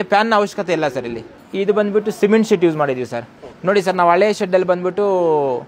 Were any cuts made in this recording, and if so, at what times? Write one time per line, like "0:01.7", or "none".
none